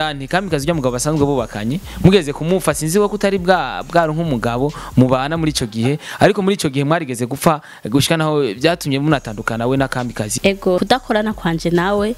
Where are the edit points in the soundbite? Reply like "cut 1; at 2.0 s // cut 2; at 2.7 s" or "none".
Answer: cut 1; at 10.7 s